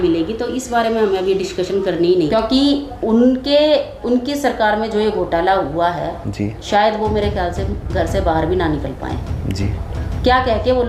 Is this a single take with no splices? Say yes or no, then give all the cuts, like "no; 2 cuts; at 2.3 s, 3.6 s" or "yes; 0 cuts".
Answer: no; 1 cut; at 2.2 s